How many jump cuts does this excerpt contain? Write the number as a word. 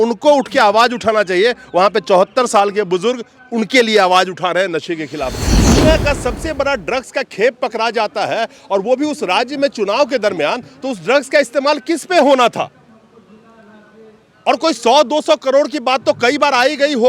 one